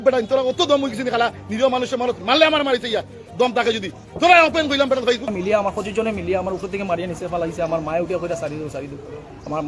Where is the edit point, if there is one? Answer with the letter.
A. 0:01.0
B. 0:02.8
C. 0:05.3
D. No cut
C